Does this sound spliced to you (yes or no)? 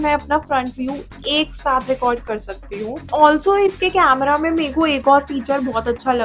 no